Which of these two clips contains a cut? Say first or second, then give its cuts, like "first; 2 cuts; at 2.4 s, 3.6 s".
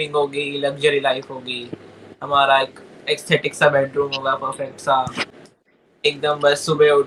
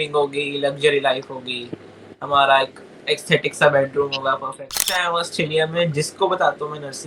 second; 1 cut; at 4.8 s